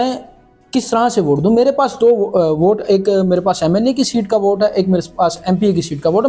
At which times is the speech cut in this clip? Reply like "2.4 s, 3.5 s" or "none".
none